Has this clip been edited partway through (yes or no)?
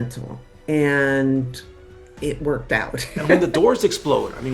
yes